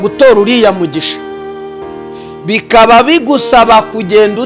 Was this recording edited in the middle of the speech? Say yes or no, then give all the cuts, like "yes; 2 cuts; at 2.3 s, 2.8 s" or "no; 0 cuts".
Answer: no; 0 cuts